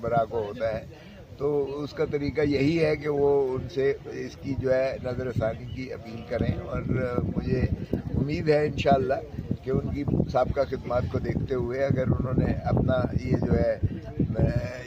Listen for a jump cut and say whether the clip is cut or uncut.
uncut